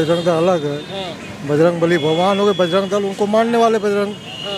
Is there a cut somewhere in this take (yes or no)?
no